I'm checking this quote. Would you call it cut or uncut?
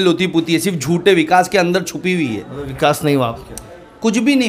uncut